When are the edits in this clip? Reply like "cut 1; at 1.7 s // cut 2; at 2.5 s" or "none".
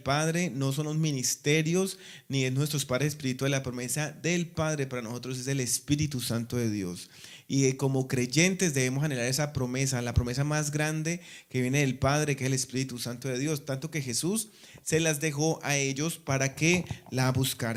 none